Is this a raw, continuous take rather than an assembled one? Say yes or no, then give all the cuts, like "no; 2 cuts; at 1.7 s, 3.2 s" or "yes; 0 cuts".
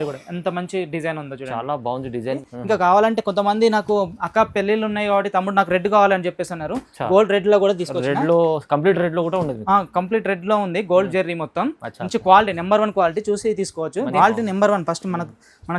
no; 2 cuts; at 2.4 s, 14.1 s